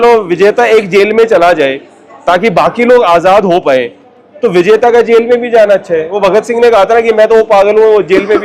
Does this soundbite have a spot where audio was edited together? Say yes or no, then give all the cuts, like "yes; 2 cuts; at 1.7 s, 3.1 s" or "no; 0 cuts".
no; 0 cuts